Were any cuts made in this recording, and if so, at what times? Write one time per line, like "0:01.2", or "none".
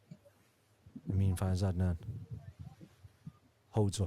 0:01.0